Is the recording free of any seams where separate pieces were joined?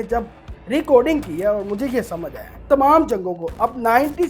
no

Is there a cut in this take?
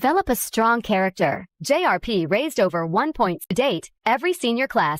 yes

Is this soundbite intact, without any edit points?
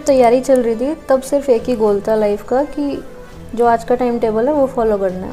yes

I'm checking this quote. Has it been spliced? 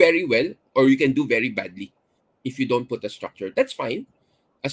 no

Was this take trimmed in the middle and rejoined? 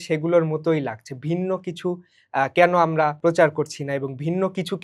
yes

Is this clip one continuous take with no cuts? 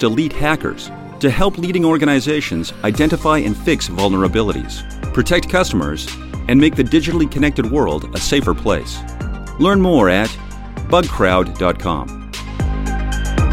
no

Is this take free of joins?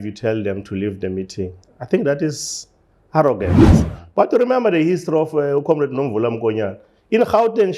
no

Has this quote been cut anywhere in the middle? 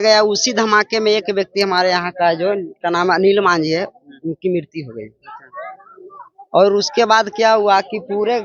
no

